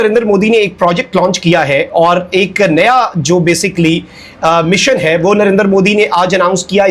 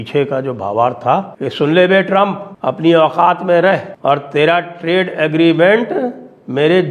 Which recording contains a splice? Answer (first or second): second